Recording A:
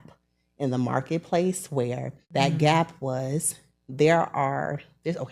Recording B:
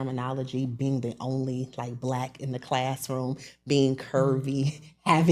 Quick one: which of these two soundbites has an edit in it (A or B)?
A